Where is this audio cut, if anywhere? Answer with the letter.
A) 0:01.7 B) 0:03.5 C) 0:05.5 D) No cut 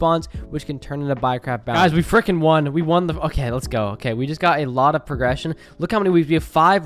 A